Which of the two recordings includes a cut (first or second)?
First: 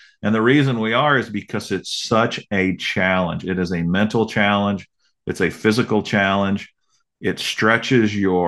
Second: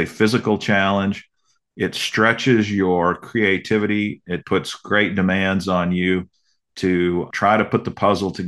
second